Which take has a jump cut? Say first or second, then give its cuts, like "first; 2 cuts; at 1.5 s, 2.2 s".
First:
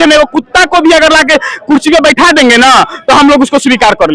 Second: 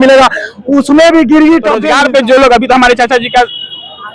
second; 1 cut; at 1.8 s